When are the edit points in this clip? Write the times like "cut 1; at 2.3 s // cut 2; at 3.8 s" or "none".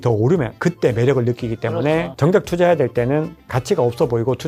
cut 1; at 2.2 s // cut 2; at 3.4 s

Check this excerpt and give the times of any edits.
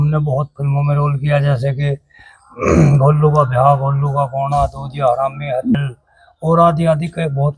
cut 1; at 5.8 s

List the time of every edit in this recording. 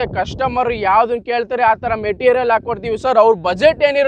none

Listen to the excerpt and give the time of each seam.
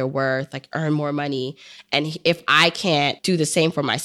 cut 1; at 3.2 s

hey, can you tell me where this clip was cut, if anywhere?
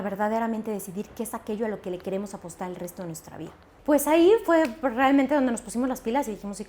cut 1; at 3.6 s

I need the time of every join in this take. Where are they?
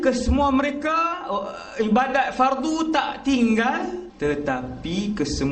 cut 1; at 4.1 s

